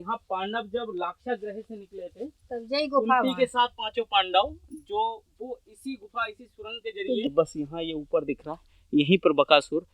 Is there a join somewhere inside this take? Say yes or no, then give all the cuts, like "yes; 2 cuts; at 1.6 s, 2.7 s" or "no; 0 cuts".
yes; 1 cut; at 7.2 s